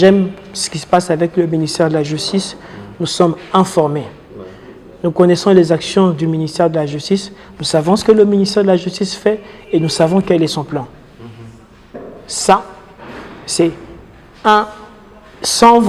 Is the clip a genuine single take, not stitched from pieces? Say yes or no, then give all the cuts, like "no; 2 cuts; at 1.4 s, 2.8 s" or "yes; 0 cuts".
yes; 0 cuts